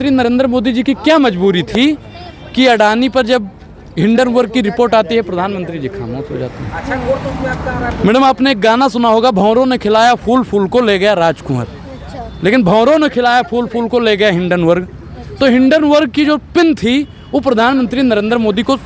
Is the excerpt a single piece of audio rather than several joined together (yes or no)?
yes